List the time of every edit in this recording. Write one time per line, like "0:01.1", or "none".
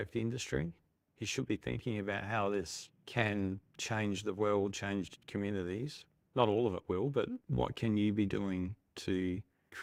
none